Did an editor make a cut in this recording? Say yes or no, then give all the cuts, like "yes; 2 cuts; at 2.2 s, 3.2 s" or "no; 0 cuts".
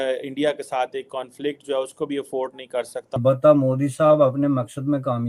yes; 1 cut; at 3.1 s